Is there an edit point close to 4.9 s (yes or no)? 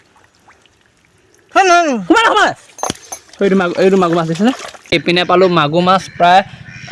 yes